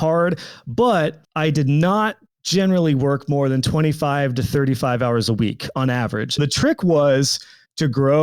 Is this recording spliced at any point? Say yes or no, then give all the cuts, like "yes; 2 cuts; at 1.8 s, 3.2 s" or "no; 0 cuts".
yes; 2 cuts; at 1.2 s, 6.4 s